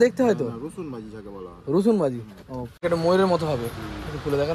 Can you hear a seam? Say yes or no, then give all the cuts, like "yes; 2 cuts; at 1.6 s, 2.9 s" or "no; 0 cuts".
yes; 1 cut; at 2.6 s